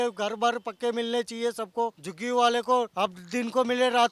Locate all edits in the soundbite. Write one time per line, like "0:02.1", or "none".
0:02.1
0:02.9